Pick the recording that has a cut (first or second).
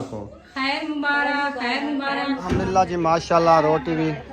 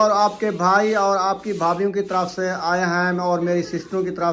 first